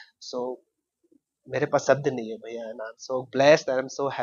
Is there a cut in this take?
no; 0 cuts

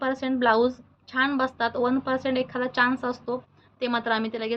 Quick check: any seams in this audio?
no; 0 cuts

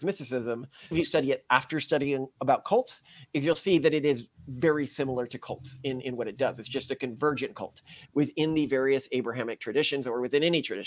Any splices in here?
yes; 2 cuts; at 0.9 s, 8.0 s

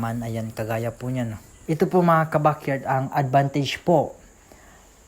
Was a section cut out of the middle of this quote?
yes; 1 cut; at 1.5 s

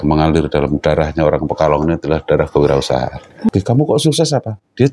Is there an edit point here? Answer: yes; 1 cut; at 3.5 s

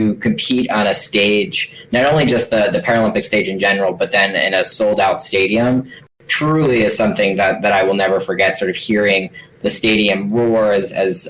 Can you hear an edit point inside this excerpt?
no; 0 cuts

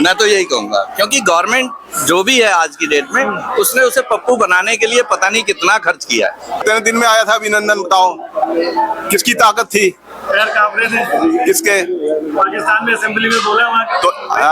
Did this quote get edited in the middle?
yes; 1 cut; at 6.6 s

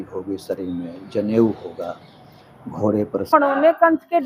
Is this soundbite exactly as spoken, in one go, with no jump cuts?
no; 1 cut; at 3.3 s

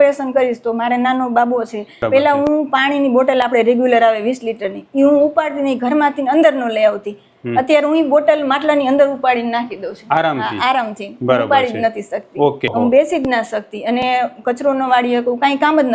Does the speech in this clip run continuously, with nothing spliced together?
no; 2 cuts; at 2.1 s, 12.7 s

